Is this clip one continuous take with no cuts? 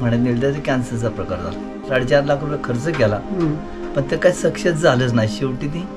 no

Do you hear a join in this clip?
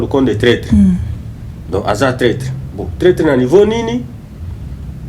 no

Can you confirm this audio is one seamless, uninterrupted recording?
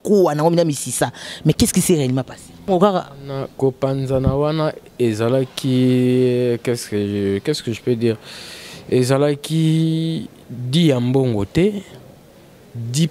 no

